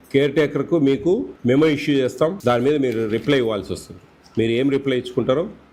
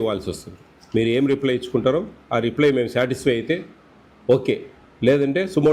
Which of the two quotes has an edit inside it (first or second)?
first